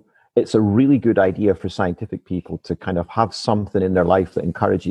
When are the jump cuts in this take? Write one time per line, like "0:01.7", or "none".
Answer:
none